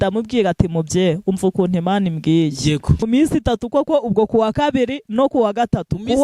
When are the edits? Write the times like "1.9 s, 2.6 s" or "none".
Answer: 3.1 s